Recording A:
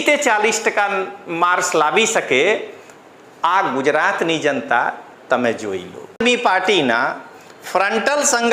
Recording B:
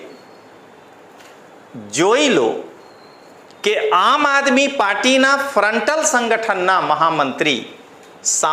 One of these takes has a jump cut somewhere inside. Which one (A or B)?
A